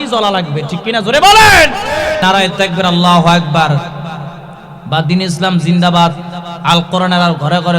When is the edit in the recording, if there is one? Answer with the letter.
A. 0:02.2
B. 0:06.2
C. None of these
A